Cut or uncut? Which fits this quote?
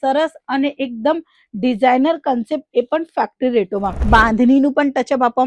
cut